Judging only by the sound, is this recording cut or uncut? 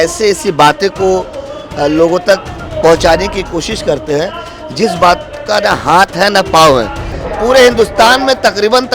cut